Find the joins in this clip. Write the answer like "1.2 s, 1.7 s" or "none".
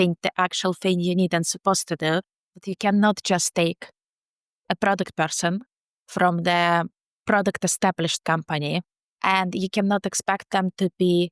2.5 s, 8.9 s